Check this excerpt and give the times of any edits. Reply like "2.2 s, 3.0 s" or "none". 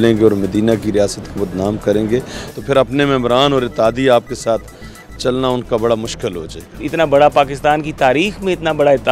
6.8 s